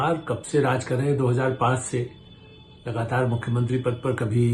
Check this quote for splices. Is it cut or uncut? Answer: uncut